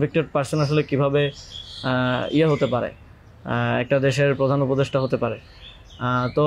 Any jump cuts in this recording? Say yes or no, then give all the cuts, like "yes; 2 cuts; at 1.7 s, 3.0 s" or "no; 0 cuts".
no; 0 cuts